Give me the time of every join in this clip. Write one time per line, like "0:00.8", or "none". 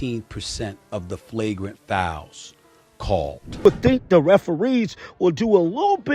0:03.5